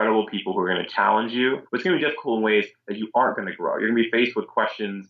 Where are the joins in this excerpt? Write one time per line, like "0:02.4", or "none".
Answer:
0:01.7